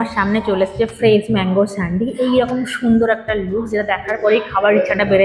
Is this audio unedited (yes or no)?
yes